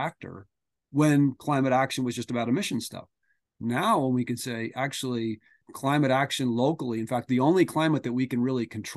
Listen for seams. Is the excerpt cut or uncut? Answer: cut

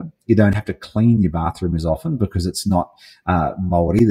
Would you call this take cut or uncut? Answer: uncut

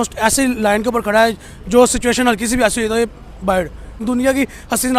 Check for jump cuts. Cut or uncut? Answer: cut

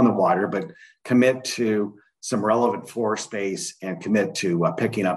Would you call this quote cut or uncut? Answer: uncut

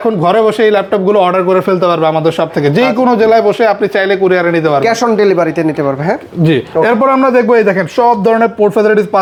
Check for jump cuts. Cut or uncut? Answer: uncut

